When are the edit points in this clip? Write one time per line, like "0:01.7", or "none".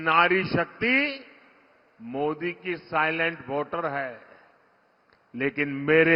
none